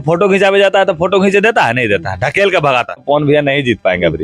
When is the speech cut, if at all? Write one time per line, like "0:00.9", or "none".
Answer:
0:03.0

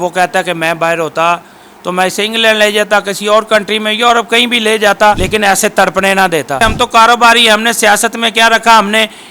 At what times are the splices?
0:05.2
0:06.6

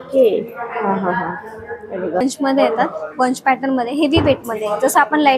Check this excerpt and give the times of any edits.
0:02.2

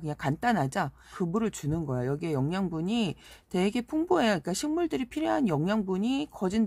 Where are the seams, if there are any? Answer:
0:01.1

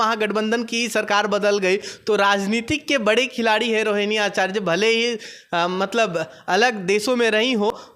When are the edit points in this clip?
none

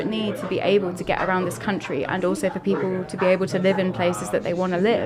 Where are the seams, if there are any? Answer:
none

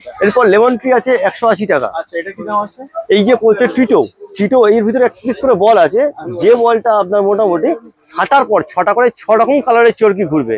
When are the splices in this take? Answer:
none

